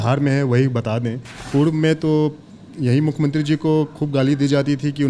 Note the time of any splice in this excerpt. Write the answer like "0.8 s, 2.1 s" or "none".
1.4 s